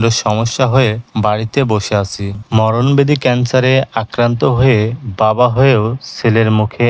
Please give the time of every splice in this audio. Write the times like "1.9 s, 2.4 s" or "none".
2.4 s